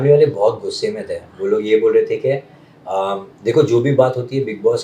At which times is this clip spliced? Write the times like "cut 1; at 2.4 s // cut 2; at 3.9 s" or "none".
none